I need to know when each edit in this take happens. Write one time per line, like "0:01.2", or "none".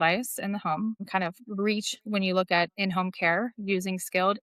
0:01.0